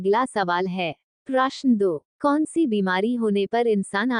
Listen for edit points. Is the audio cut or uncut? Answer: cut